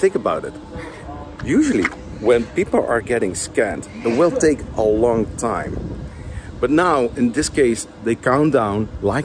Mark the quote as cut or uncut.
uncut